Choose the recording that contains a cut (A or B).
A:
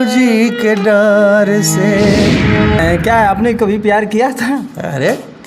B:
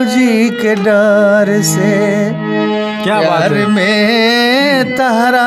A